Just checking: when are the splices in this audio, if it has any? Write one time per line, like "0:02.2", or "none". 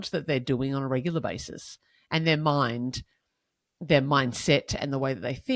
none